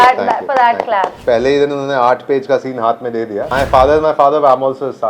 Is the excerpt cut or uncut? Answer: cut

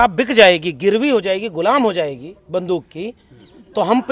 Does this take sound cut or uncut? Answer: uncut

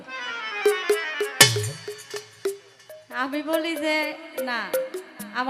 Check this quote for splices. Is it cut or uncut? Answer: uncut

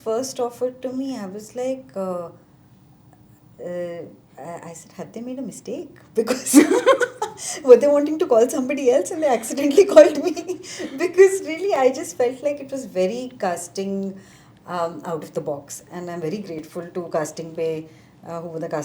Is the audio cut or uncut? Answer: uncut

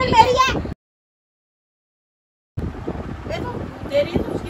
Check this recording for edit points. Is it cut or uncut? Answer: uncut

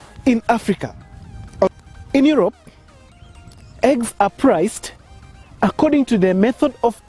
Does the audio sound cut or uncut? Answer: cut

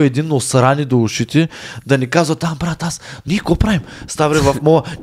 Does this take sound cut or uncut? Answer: cut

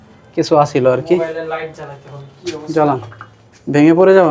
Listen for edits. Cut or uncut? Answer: uncut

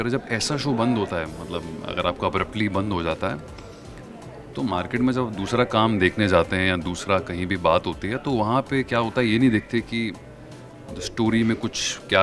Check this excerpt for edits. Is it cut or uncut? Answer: uncut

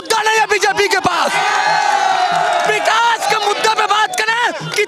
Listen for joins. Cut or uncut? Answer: uncut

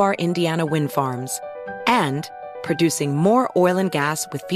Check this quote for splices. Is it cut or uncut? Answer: uncut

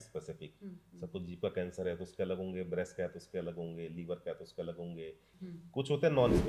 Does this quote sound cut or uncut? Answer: cut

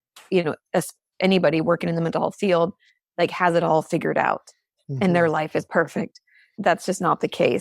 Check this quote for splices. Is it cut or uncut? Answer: cut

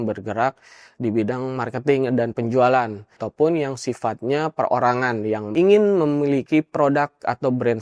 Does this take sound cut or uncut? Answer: cut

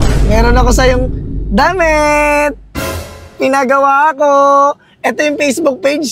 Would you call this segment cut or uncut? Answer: uncut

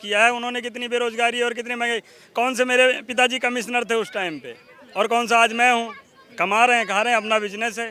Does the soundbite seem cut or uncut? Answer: uncut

